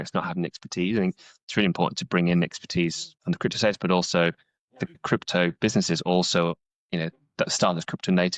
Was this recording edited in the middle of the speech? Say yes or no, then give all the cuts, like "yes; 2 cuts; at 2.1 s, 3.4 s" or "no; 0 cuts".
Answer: no; 0 cuts